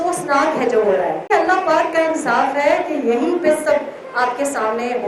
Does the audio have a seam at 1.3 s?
yes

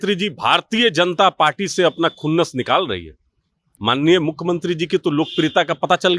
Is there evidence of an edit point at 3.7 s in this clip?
yes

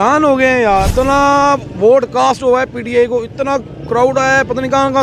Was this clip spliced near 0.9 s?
yes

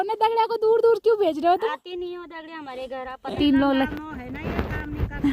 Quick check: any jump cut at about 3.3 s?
yes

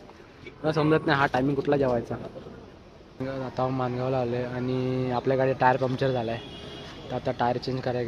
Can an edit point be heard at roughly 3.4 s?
yes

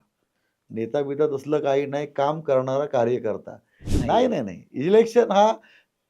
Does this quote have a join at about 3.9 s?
yes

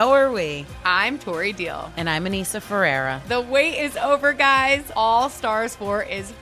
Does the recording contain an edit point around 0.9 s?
no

